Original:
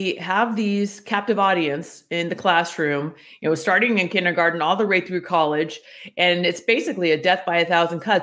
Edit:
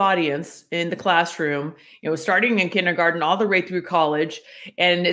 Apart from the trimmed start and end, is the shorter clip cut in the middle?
no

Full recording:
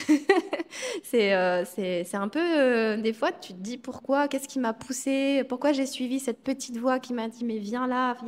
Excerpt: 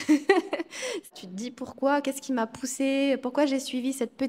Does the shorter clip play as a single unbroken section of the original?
no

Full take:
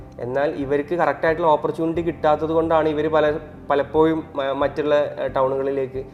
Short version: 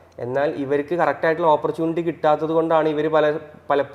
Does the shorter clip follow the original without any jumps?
yes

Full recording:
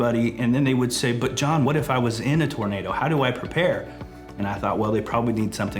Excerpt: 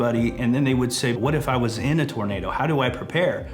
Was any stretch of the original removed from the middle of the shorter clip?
yes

